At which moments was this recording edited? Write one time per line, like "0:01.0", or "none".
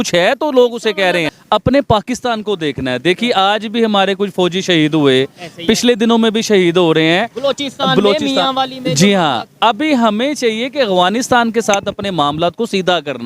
0:01.3